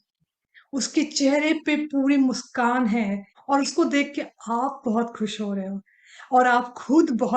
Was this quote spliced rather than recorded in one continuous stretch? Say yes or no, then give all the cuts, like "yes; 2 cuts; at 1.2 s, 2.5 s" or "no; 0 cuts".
yes; 1 cut; at 3.3 s